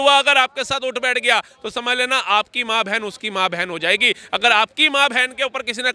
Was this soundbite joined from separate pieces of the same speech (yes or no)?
no